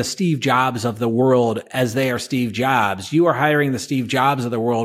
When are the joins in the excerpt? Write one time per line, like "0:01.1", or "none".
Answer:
0:01.7